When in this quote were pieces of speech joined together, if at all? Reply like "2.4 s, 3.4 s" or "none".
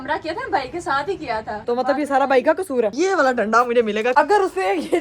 1.6 s, 2.9 s, 4.1 s

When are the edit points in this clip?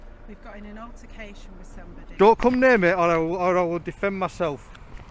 2.1 s

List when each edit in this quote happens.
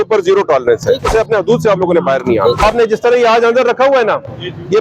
1.1 s, 2.6 s

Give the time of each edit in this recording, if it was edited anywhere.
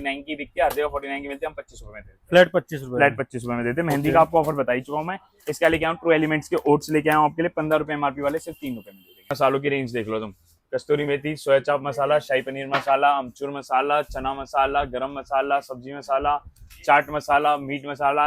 9.3 s

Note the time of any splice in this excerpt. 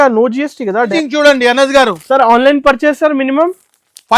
0.9 s

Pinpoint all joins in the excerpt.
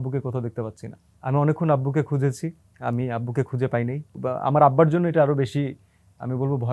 1.1 s, 2.7 s, 4.2 s

